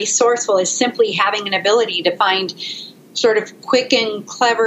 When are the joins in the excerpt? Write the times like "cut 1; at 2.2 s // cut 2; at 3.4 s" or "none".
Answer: none